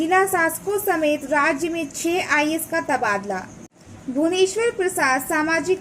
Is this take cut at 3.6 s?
yes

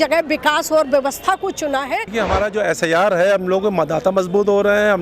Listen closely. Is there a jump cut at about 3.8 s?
no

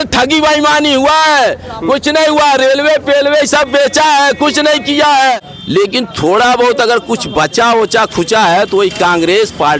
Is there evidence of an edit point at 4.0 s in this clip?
no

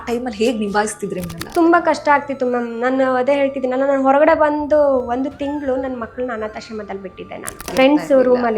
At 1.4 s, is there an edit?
yes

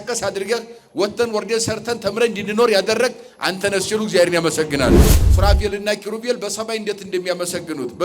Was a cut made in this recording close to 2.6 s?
no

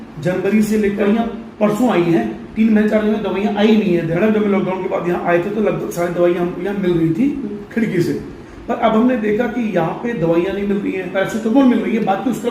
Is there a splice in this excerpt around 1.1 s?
yes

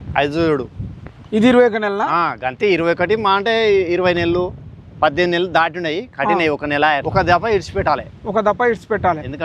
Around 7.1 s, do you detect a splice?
yes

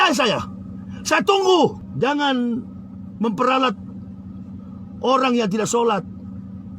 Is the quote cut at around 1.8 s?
yes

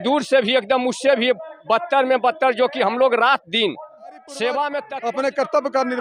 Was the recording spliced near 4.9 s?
yes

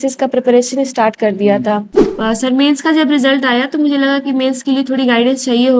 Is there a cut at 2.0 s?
yes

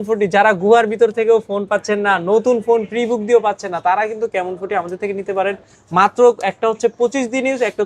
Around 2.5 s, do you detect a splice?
no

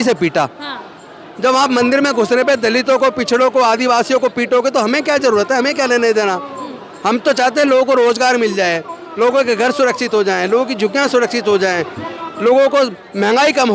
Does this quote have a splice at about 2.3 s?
no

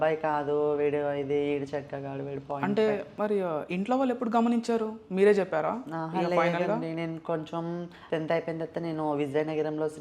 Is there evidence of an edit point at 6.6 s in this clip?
no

